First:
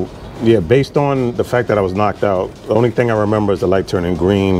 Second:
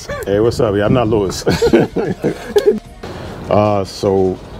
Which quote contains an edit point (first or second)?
second